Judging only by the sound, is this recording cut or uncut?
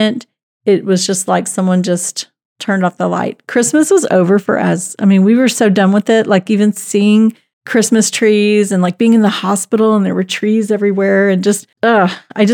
uncut